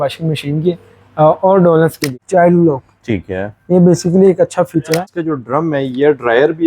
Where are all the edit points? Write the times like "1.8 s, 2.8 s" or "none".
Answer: 2.1 s, 5.1 s